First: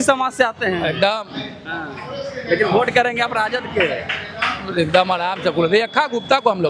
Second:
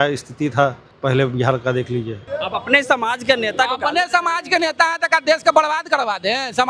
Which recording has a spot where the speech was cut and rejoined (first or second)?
second